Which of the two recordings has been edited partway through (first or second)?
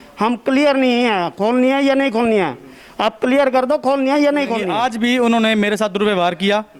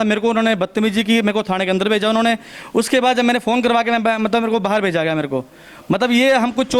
first